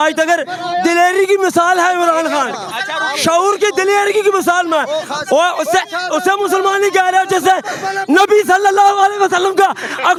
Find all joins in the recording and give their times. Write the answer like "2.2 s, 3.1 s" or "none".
none